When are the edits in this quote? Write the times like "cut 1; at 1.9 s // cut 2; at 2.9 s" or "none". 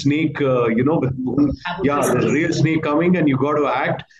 none